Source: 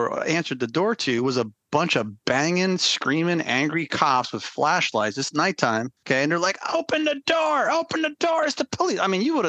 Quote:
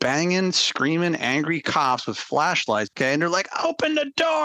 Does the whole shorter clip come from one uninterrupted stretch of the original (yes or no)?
no